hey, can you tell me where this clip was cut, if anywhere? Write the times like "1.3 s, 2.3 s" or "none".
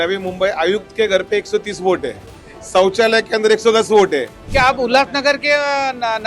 4.4 s